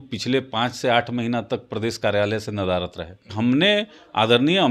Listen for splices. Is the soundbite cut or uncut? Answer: cut